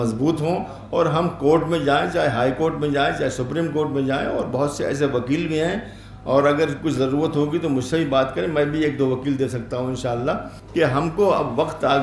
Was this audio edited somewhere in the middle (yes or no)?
yes